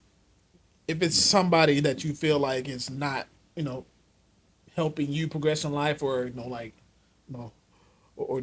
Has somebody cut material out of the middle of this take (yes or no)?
no